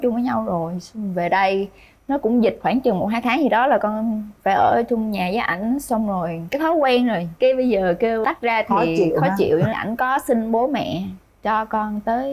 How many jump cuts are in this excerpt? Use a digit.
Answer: 0